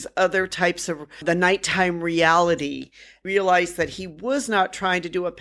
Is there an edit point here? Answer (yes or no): yes